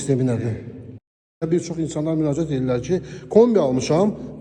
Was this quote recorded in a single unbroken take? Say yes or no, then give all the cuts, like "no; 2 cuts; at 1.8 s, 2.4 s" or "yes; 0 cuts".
no; 1 cut; at 1.2 s